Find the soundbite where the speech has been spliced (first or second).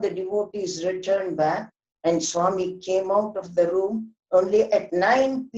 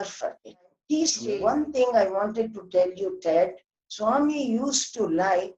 second